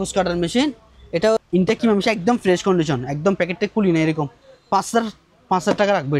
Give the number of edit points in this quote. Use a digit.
1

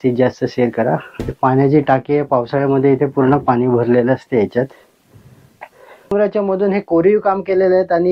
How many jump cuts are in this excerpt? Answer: 2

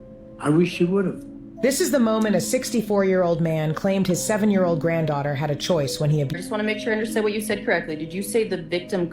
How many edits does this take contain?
1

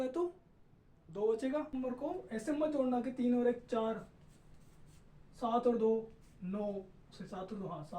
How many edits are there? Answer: 1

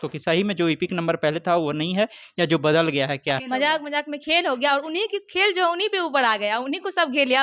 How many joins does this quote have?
1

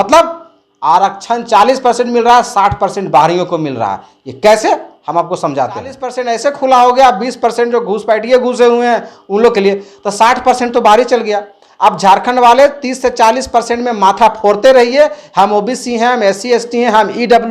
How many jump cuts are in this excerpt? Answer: 1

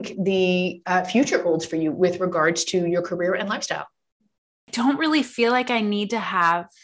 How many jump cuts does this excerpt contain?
1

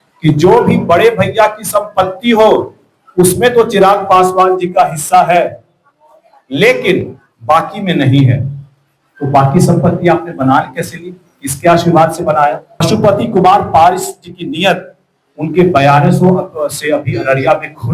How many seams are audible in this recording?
1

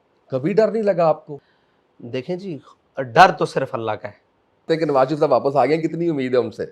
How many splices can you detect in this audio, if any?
2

